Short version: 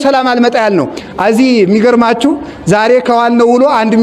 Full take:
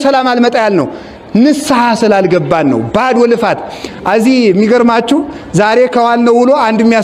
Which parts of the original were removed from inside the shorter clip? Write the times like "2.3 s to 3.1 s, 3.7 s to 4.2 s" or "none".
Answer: 1.0 s to 3.9 s